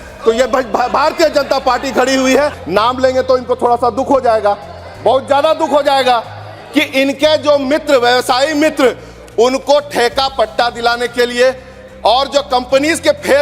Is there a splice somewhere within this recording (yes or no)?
yes